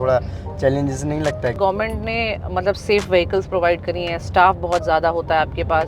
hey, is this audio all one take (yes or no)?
no